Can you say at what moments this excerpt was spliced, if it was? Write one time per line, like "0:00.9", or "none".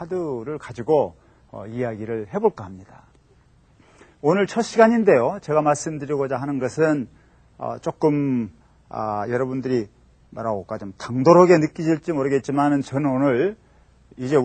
0:06.7

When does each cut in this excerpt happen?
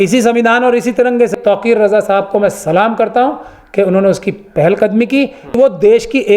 0:01.3
0:05.5

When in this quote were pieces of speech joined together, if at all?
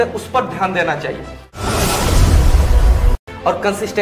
0:01.5
0:03.2

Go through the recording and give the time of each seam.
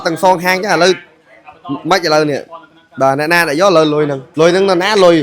0:04.2

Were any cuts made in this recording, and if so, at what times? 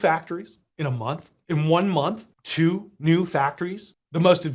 none

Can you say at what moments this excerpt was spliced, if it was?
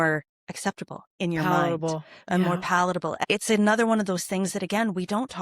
0:03.2

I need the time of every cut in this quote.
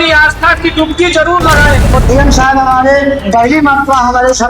0:01.9

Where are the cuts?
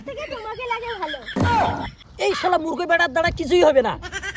0:02.0

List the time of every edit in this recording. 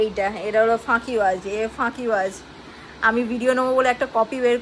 none

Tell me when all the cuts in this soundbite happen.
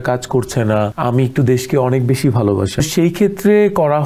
0:00.9
0:02.8

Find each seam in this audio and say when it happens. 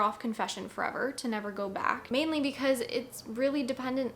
0:02.0

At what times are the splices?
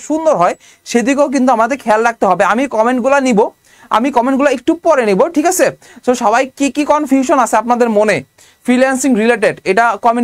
none

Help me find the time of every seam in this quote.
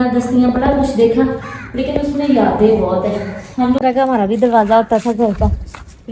0:03.8

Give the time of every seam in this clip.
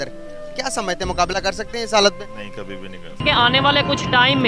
0:03.0

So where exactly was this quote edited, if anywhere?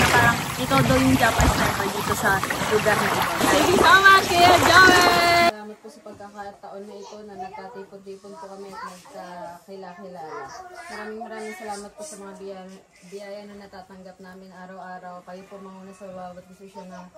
0:05.5

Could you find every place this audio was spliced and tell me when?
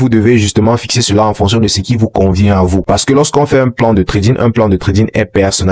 none

